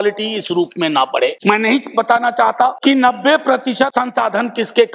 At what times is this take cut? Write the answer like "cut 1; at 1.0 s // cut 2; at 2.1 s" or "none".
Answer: cut 1; at 0.9 s // cut 2; at 2.8 s // cut 3; at 3.9 s